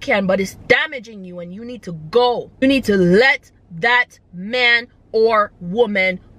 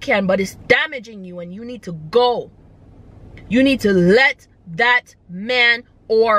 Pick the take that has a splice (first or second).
first